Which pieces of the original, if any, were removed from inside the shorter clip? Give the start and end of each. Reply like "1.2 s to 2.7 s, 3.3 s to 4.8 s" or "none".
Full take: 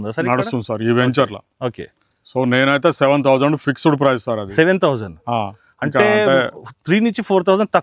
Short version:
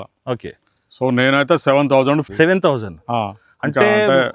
3.6 s to 4.5 s